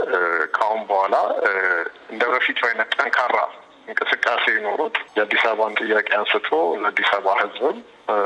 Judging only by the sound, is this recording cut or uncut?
uncut